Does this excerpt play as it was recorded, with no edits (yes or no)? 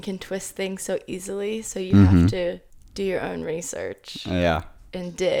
yes